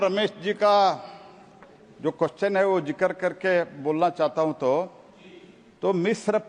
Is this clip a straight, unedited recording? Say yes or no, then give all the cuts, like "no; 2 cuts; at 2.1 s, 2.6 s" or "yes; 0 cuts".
yes; 0 cuts